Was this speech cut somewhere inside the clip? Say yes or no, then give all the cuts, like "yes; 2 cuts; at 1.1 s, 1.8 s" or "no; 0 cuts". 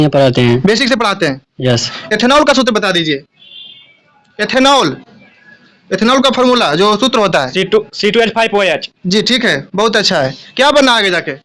yes; 1 cut; at 1.9 s